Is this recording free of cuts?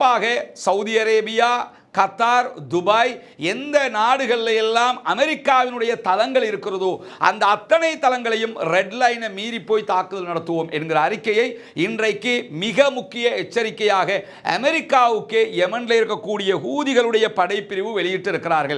yes; 0 cuts

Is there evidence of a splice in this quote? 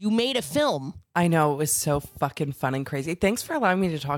yes; 1 cut; at 1.0 s

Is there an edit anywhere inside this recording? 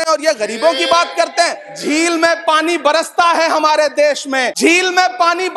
yes; 2 cuts; at 1.7 s, 4.5 s

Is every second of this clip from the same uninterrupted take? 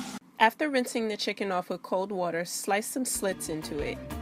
yes; 0 cuts

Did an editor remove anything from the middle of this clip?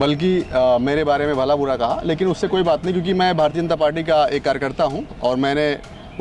no; 0 cuts

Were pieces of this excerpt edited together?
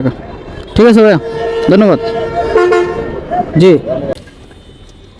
yes; 1 cut; at 4.2 s

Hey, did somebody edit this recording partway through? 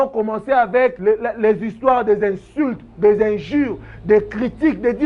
yes; 1 cut; at 1.0 s

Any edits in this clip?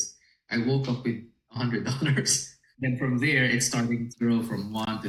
no; 0 cuts

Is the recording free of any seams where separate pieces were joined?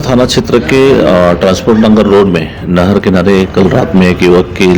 yes; 0 cuts

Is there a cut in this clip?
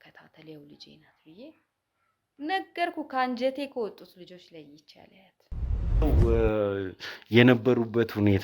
yes; 1 cut; at 6.0 s

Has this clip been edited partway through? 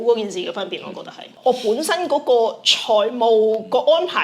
yes; 1 cut; at 1.3 s

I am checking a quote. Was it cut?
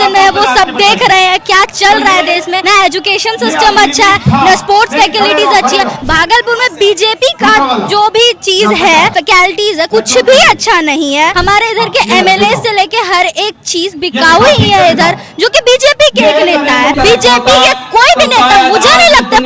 yes; 5 cuts; at 2.6 s, 6.0 s, 9.5 s, 11.4 s, 16.9 s

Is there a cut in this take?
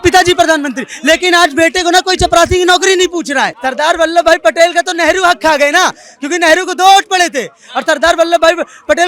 yes; 1 cut; at 3.6 s

